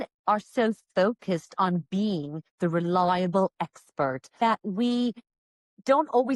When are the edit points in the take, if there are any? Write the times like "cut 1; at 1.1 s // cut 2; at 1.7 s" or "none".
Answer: cut 1; at 4.4 s